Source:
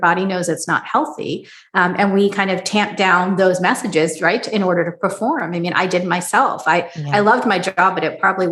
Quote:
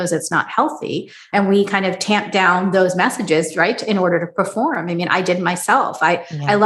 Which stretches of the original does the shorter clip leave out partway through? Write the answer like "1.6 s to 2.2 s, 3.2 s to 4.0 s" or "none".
1.6 s to 1.9 s